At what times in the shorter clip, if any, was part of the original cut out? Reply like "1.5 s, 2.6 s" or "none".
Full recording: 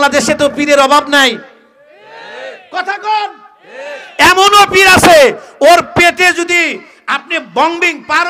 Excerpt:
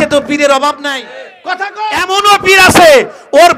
0.8 s, 2.1 s